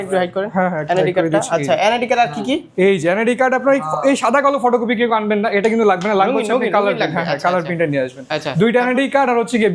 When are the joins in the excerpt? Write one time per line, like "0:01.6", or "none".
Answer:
none